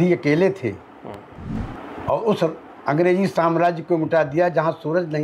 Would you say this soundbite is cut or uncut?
cut